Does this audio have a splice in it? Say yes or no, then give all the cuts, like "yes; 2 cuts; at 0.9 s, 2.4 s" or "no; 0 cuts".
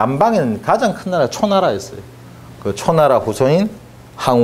yes; 1 cut; at 1.9 s